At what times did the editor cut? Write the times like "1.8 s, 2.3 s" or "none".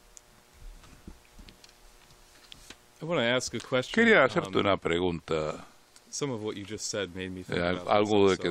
none